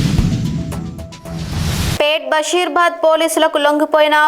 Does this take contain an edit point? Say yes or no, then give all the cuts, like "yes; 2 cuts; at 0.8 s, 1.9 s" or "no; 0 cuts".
yes; 1 cut; at 2.0 s